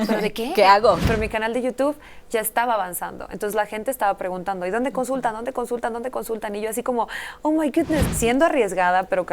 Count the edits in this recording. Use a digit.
2